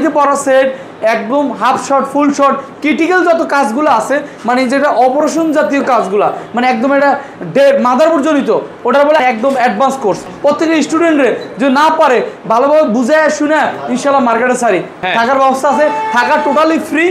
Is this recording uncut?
no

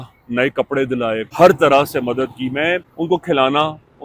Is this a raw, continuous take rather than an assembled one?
no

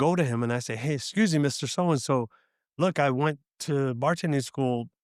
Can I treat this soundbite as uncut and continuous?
yes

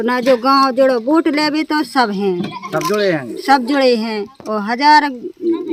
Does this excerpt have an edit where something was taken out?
no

